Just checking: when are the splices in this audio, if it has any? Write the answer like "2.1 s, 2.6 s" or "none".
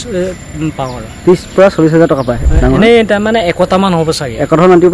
2.4 s